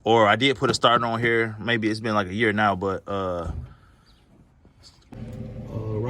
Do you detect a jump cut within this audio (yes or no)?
yes